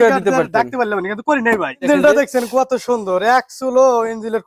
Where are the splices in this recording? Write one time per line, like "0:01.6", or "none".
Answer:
0:01.9